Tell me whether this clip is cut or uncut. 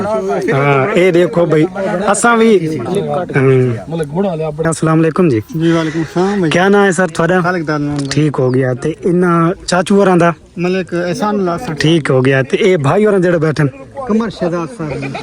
cut